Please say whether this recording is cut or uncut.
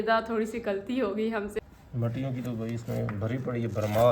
cut